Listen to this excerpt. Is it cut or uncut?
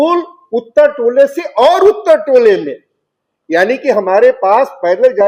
uncut